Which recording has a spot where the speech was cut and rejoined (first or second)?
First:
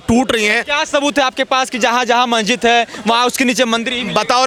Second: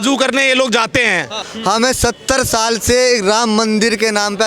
second